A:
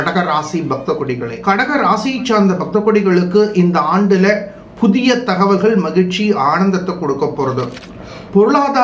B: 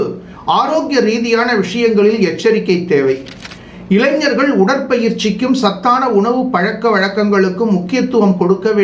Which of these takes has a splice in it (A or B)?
A